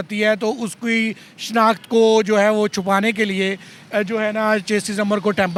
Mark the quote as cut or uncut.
uncut